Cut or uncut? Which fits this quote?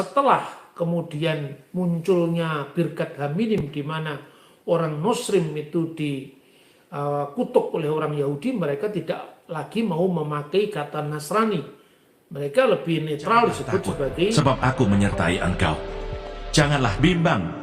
cut